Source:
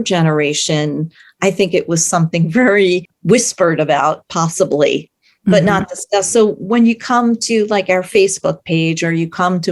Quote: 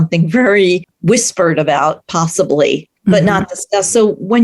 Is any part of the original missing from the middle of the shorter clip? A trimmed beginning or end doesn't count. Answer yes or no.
yes